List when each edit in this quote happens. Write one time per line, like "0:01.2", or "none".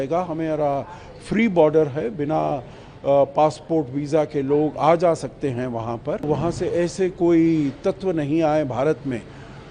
0:06.2